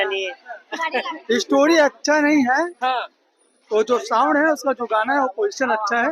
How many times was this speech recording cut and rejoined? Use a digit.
0